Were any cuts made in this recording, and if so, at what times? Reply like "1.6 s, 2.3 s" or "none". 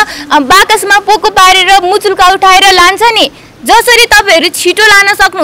none